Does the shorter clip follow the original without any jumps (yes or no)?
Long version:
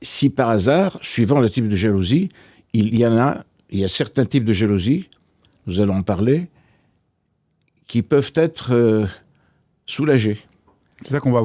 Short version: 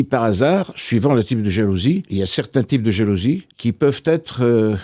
no